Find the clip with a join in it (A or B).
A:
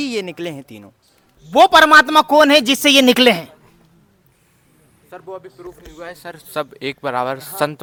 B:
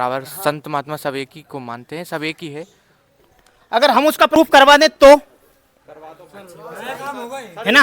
B